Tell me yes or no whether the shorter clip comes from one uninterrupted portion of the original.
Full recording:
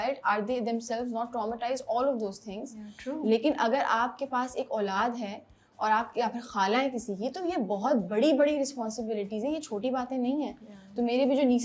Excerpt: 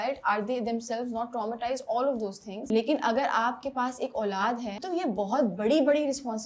no